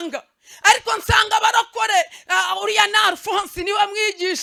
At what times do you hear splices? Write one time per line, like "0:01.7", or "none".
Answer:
none